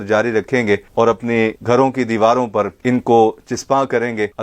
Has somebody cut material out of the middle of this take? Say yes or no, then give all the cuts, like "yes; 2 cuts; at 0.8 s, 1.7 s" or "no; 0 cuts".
yes; 1 cut; at 1.6 s